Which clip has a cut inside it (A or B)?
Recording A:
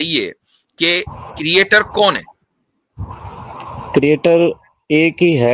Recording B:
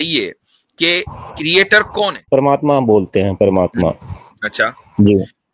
B